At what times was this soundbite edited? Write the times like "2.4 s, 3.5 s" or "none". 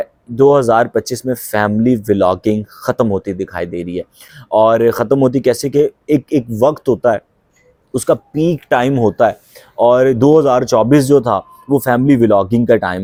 none